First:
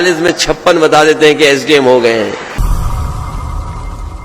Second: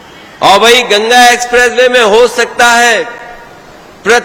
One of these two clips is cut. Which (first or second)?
first